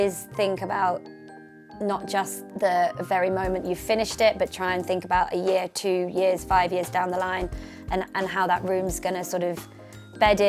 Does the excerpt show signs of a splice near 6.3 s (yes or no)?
no